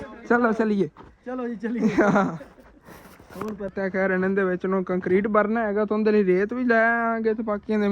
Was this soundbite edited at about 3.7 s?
yes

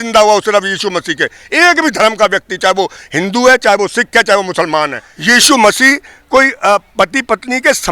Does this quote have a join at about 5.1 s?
yes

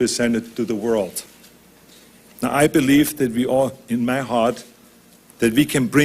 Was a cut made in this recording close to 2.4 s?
no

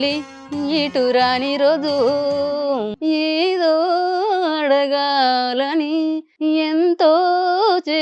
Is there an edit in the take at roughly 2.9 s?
yes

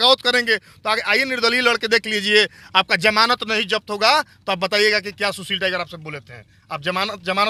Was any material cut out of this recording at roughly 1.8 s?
no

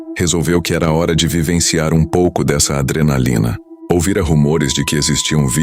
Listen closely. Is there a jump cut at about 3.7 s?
yes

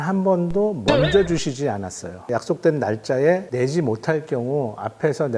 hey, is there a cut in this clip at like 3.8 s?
no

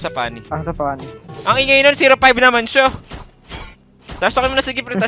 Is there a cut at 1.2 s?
yes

